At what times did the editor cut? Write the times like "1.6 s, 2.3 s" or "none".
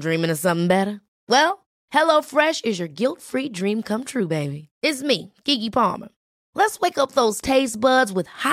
none